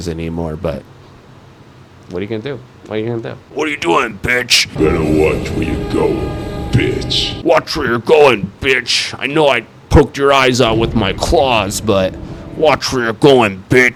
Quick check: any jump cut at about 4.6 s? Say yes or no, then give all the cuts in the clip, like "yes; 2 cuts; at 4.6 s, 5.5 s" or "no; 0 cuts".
no; 0 cuts